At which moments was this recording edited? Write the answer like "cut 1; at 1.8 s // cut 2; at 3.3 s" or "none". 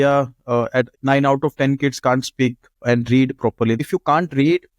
cut 1; at 0.9 s // cut 2; at 3.8 s